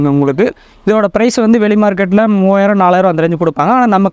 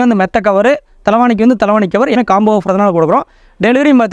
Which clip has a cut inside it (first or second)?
second